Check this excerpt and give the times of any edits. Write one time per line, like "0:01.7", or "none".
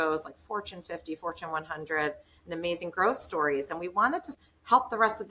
0:04.3